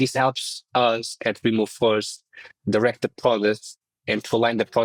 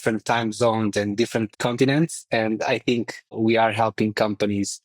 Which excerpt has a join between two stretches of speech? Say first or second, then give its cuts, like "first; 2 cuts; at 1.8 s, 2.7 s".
second; 2 cuts; at 1.5 s, 3.3 s